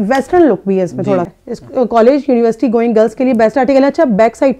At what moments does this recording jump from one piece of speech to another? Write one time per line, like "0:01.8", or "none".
0:01.3